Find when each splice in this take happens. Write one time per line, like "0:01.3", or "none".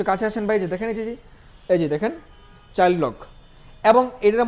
none